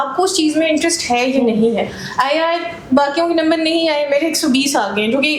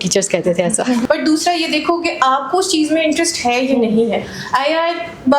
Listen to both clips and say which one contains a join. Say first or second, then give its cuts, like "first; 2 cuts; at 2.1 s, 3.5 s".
second; 1 cut; at 1.0 s